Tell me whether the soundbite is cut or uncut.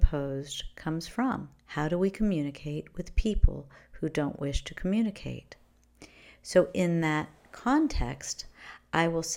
cut